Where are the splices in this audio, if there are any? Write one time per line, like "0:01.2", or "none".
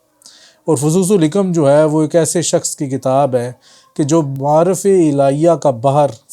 0:04.3